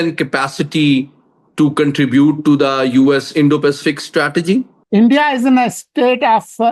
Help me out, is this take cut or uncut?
cut